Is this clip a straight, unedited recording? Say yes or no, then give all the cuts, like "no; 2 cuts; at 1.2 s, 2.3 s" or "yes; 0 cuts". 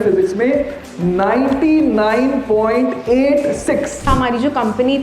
no; 1 cut; at 4.1 s